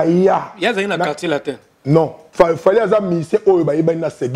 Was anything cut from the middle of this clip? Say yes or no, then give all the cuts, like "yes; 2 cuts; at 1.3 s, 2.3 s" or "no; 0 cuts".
yes; 1 cut; at 2.2 s